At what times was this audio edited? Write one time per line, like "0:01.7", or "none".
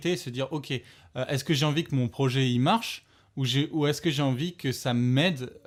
none

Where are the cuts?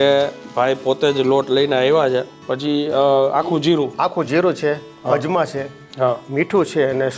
0:02.3

